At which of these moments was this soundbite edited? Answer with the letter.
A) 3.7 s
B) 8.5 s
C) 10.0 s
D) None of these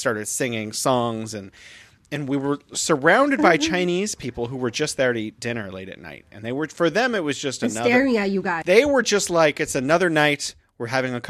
B